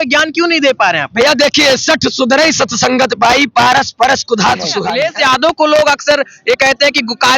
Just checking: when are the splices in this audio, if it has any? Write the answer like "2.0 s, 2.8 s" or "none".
4.8 s